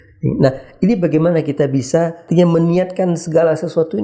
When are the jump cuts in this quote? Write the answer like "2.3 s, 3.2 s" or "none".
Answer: 2.2 s